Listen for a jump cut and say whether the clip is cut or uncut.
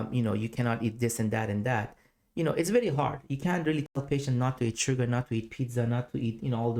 uncut